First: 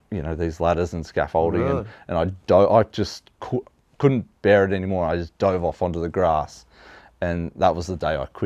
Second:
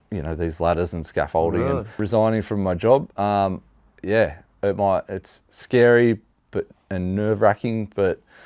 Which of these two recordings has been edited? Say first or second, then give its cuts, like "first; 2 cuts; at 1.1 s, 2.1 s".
second; 1 cut; at 2.0 s